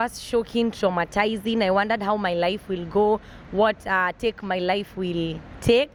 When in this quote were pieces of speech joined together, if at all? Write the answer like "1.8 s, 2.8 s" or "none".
none